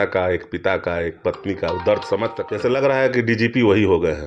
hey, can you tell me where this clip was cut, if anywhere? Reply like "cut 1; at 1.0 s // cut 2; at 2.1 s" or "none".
cut 1; at 2.4 s